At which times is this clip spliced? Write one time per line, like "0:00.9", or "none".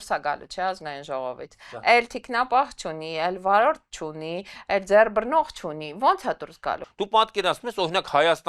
0:06.8